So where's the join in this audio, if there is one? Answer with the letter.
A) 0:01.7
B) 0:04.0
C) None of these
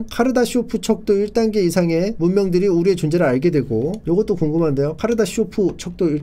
B